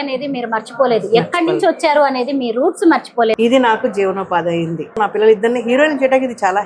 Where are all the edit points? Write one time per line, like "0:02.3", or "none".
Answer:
0:03.4
0:05.0